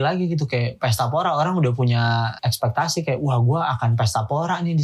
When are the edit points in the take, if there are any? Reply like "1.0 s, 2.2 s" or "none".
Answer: 2.4 s